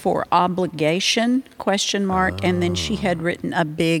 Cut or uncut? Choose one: uncut